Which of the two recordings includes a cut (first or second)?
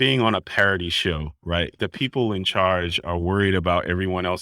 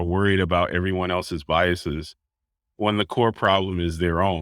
first